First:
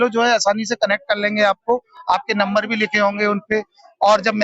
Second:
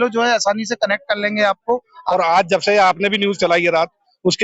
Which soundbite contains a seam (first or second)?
second